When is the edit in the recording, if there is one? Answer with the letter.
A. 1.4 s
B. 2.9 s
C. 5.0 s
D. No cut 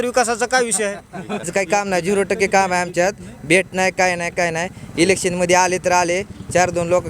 A